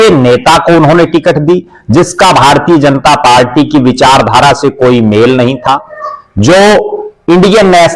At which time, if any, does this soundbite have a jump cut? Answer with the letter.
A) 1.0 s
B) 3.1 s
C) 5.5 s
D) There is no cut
D